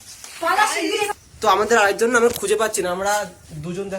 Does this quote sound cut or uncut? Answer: cut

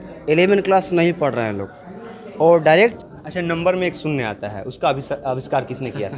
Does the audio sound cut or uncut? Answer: cut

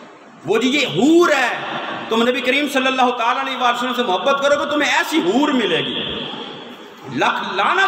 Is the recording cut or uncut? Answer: uncut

